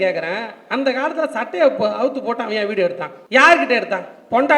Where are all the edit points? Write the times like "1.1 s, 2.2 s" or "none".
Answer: 3.1 s